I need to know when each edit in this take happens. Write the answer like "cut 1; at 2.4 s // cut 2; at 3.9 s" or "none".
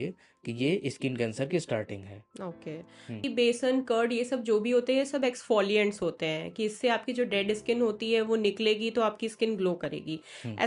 cut 1; at 3.2 s